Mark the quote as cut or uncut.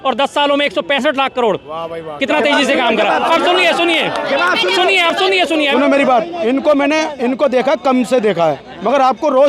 cut